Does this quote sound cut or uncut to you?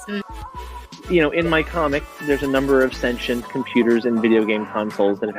uncut